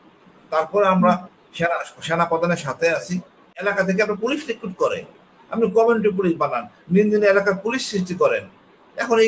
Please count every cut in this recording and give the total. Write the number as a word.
one